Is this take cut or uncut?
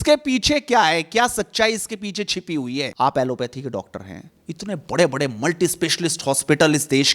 cut